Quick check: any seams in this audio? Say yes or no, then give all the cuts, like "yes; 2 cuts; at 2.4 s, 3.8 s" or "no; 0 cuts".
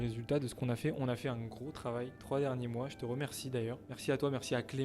yes; 2 cuts; at 2.2 s, 3.9 s